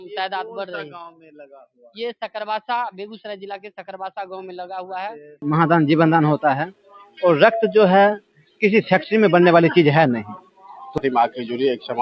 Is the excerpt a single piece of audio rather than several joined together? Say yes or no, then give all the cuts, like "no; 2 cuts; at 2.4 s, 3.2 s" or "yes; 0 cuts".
no; 2 cuts; at 5.4 s, 11.0 s